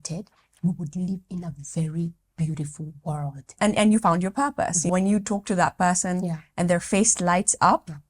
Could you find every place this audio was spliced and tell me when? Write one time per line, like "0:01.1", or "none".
0:03.5
0:04.9